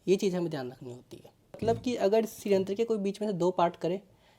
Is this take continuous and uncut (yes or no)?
no